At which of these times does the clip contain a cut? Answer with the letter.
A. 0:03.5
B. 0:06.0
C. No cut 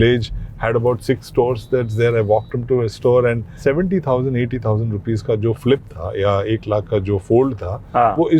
A